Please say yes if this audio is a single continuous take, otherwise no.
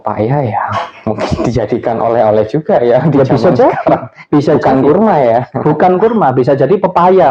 yes